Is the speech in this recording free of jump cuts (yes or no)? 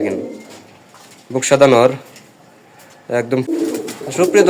no